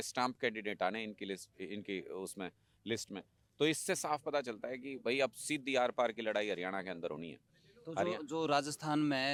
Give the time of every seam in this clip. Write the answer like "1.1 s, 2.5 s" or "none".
none